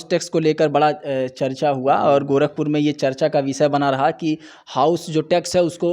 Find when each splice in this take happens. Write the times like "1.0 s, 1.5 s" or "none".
none